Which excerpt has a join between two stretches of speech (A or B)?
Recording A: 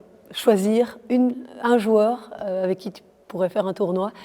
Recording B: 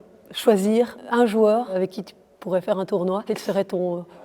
B